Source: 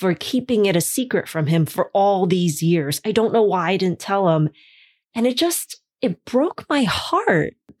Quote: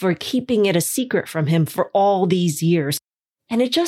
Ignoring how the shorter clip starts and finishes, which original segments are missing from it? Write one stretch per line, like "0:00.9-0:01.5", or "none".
0:03.0-0:04.6

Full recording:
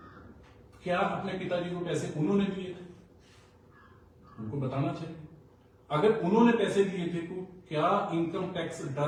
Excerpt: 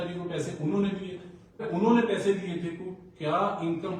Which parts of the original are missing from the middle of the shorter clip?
0:03.2-0:06.2

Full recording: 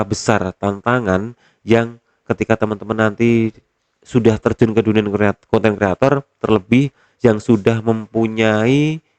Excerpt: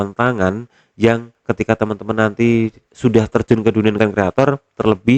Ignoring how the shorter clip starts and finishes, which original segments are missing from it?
0:02.0-0:02.1
0:03.6-0:03.9
0:05.1-0:05.6

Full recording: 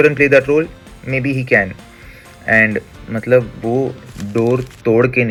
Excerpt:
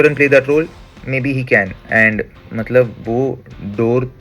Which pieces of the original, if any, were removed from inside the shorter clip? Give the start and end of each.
0:01.8-0:02.3

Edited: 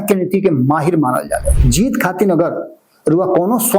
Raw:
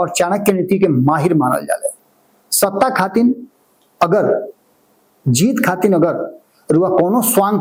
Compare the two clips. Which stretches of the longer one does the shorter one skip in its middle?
0:01.9-0:05.2

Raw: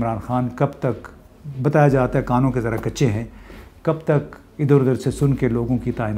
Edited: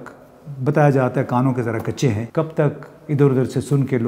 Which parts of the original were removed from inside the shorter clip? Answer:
0:03.2-0:03.7

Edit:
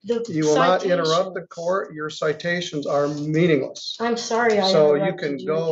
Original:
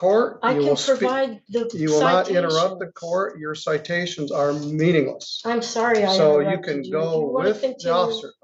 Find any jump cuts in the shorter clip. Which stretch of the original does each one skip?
none

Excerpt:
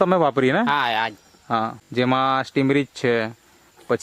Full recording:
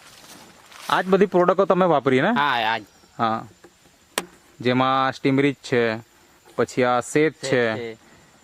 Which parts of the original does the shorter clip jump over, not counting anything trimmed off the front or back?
0:03.5-0:04.5

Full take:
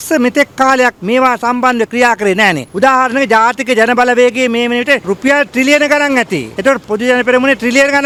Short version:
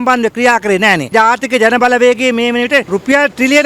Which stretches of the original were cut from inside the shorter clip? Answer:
0:02.7-0:03.3

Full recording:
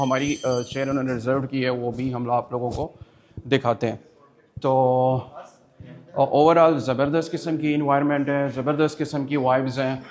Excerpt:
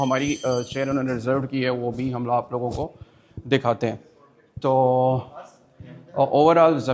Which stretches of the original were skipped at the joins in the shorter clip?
none

